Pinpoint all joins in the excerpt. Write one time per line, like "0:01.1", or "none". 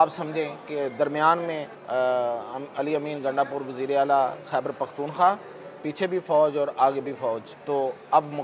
0:01.7
0:07.5